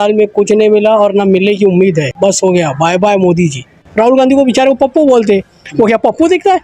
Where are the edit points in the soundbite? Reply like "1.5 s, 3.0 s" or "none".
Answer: 2.1 s, 3.7 s